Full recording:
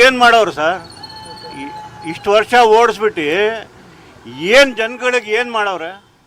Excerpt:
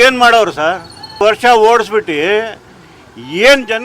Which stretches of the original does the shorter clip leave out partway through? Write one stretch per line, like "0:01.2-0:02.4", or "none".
0:01.0-0:02.1